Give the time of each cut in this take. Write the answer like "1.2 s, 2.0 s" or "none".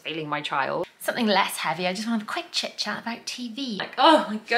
0.9 s, 3.8 s